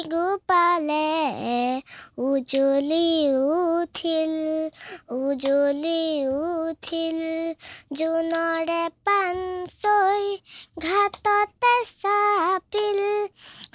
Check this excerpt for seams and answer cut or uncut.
uncut